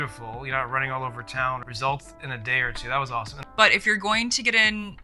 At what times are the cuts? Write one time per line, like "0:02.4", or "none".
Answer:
0:01.7
0:03.5